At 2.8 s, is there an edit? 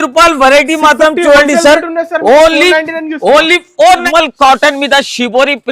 no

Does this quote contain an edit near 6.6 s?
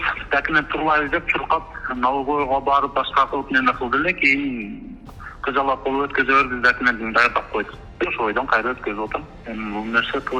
no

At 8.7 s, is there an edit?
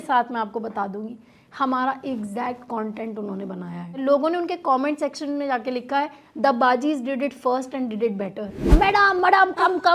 yes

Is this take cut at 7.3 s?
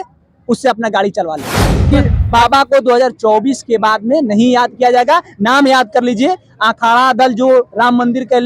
no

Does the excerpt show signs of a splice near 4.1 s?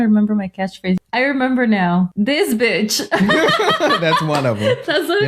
no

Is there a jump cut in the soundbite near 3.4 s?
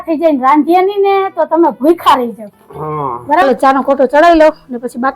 yes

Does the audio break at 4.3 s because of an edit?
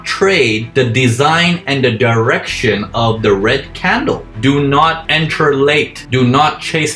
yes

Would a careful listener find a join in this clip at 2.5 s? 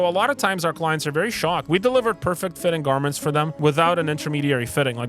no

